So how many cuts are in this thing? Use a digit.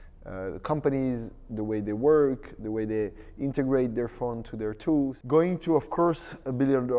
1